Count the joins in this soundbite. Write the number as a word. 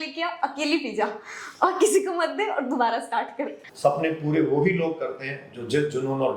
one